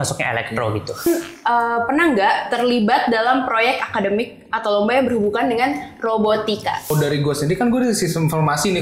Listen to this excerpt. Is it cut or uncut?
cut